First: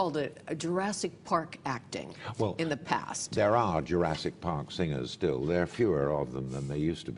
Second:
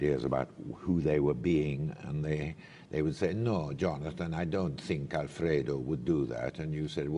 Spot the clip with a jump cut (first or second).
second